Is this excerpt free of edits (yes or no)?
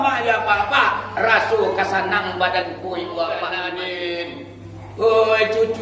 no